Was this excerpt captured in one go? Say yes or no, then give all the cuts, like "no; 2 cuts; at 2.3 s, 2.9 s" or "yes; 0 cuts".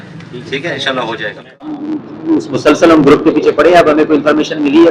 no; 1 cut; at 1.8 s